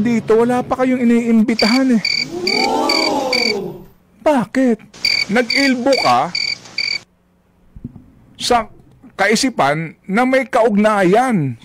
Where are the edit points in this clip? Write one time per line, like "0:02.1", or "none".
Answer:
none